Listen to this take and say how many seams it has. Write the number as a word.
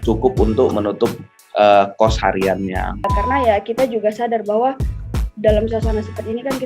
one